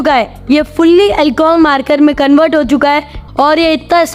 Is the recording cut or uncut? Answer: cut